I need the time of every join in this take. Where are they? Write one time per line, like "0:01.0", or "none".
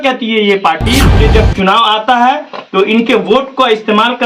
0:01.1

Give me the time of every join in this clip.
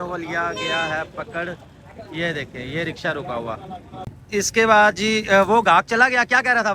0:04.1

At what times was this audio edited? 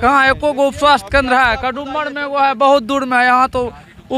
none

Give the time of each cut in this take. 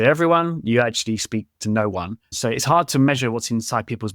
0:02.3

